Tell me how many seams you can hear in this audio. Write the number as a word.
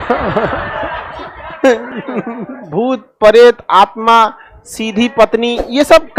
one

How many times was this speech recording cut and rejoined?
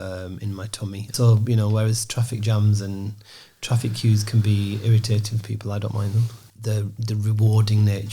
two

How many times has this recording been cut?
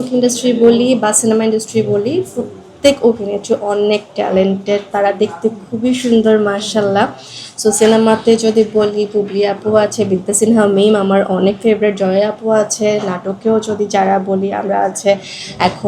zero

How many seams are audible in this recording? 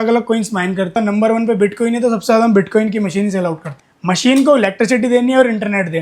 two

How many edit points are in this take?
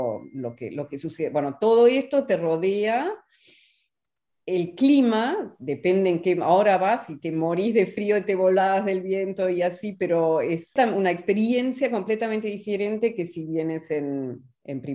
one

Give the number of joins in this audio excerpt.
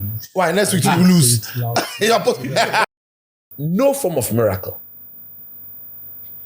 one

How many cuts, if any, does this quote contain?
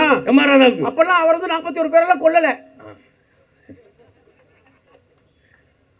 zero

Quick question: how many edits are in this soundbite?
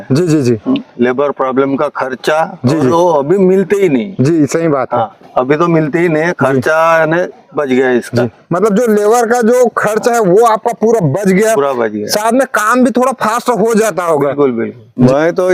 zero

